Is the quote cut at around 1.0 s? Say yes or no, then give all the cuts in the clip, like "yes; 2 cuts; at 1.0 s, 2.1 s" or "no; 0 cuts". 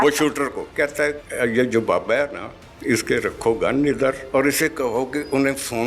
yes; 2 cuts; at 1.0 s, 4.2 s